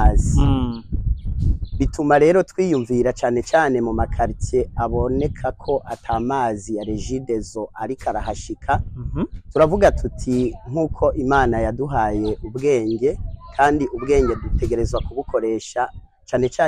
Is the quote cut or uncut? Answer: uncut